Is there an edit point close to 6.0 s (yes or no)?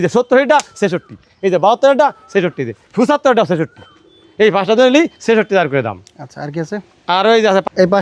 no